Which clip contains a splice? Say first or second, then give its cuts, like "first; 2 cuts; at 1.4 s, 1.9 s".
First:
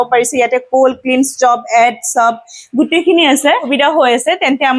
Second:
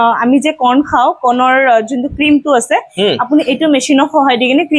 first; 1 cut; at 3.7 s